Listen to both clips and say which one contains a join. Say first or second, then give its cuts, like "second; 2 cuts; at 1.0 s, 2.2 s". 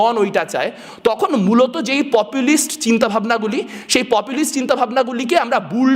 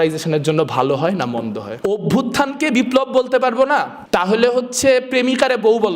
second; 2 cuts; at 1.7 s, 4.0 s